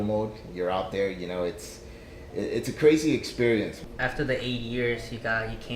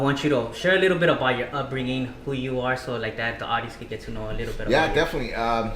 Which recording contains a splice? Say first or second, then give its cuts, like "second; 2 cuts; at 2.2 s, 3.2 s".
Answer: first; 1 cut; at 3.8 s